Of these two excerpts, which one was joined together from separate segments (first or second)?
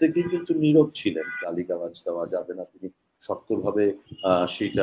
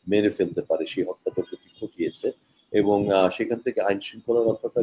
first